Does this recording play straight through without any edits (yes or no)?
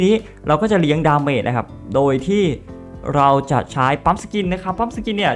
yes